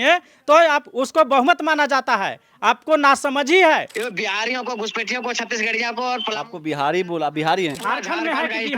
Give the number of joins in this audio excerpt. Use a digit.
2